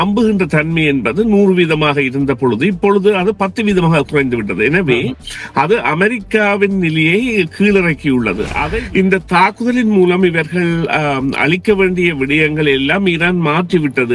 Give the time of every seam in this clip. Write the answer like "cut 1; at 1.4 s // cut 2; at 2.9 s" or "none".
cut 1; at 8.6 s